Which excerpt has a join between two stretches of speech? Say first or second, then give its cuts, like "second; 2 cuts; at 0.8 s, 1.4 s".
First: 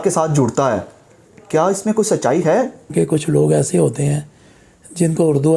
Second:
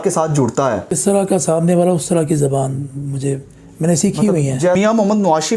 second; 2 cuts; at 1.0 s, 4.8 s